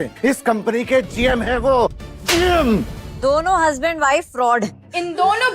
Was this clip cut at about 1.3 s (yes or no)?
no